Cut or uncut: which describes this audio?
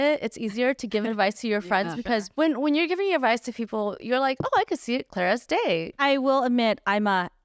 cut